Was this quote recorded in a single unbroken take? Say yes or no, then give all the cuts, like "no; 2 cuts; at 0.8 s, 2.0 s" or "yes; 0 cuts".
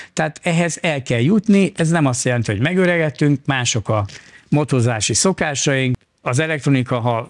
no; 1 cut; at 6.0 s